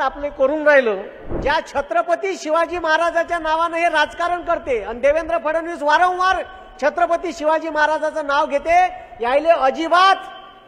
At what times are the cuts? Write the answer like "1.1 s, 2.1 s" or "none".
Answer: 1.2 s